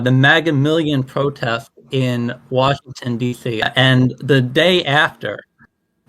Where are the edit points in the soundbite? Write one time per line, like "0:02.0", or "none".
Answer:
0:03.7